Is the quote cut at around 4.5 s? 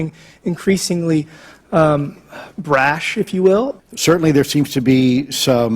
yes; 1 cut; at 4.5 s

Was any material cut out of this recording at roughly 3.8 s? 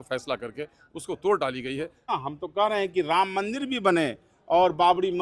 no; 1 cut; at 2.1 s

